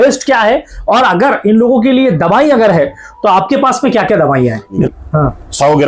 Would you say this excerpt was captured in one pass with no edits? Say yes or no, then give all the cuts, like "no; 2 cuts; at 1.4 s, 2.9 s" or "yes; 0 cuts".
no; 1 cut; at 4.9 s